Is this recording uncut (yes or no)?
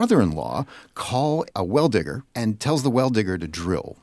no